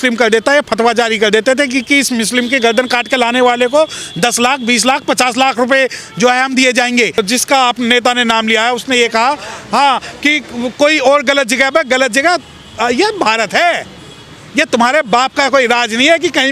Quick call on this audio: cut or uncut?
cut